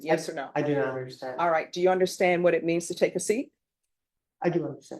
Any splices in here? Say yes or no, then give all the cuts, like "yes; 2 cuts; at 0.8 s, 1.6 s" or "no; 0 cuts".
no; 0 cuts